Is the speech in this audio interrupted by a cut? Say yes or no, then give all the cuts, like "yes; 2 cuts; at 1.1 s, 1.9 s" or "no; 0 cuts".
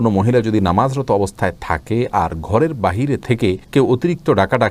no; 0 cuts